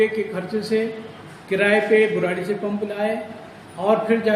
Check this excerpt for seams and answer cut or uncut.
uncut